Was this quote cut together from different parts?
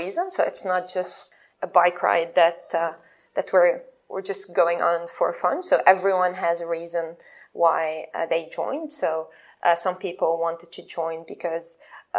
yes; 1 cut; at 1.2 s

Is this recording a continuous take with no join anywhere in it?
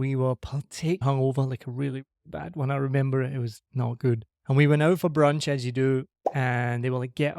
no; 2 cuts; at 1.0 s, 4.3 s

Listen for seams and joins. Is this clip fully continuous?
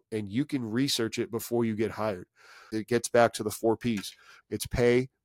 no; 2 cuts; at 2.8 s, 4.3 s

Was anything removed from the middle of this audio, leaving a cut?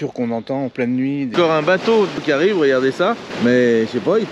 yes; 3 cuts; at 1.3 s, 2.2 s, 3.3 s

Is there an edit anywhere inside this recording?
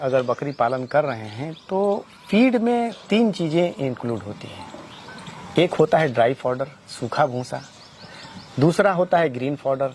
no; 0 cuts

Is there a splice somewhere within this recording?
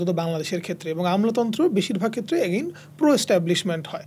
no; 0 cuts

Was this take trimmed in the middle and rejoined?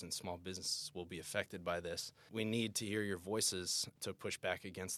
no; 0 cuts

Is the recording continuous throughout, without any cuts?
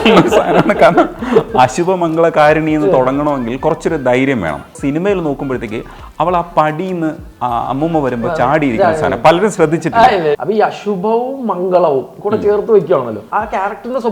no; 3 cuts; at 4.7 s, 10.4 s, 13.2 s

